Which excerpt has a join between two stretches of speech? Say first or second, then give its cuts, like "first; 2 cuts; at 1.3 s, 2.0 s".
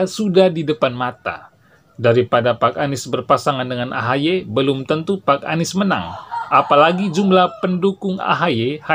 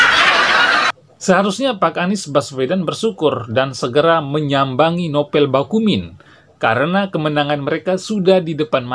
second; 1 cut; at 0.9 s